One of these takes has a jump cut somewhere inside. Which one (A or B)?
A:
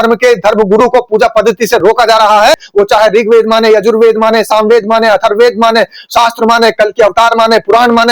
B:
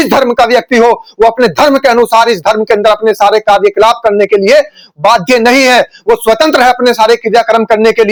A